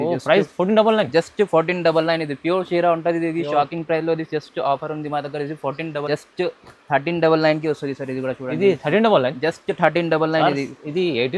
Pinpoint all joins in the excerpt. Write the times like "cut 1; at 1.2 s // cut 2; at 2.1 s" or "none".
cut 1; at 6.1 s